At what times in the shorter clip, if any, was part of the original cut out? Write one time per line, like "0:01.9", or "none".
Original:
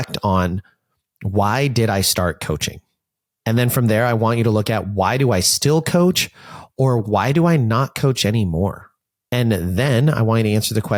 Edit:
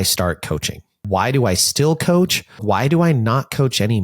0:01.0
0:02.6